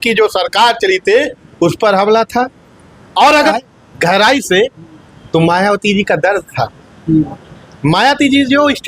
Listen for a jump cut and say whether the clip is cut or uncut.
cut